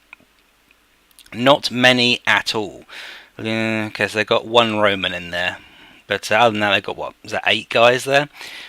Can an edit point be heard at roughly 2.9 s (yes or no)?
yes